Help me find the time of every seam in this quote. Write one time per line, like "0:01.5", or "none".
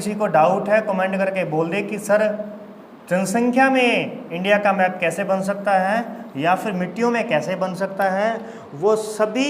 none